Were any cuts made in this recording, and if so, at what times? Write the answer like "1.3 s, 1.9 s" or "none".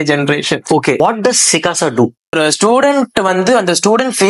1.0 s, 2.3 s